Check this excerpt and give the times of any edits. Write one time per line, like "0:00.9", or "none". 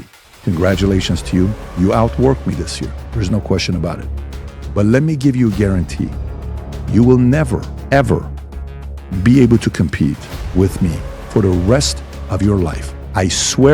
0:07.7
0:10.3